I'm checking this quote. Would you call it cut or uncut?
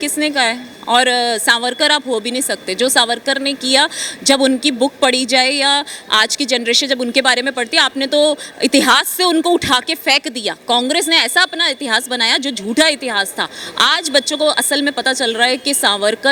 uncut